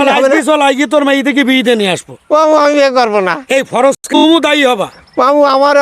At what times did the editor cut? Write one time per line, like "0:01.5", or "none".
0:04.0